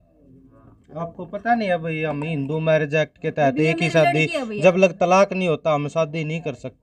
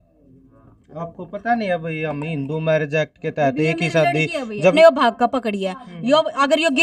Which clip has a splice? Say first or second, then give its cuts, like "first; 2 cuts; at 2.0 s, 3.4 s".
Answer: second; 1 cut; at 4.7 s